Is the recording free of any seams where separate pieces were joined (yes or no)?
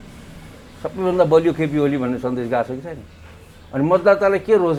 yes